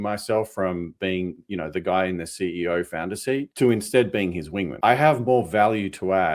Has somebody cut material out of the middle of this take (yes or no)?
yes